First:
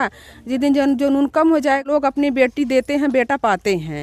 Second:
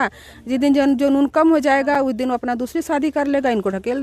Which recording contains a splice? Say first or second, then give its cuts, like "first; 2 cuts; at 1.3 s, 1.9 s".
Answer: first; 1 cut; at 1.9 s